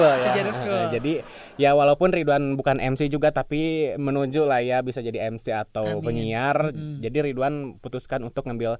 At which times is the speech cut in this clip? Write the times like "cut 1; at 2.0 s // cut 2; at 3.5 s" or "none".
none